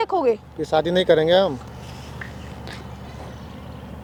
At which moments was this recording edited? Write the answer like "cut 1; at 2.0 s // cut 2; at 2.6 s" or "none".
none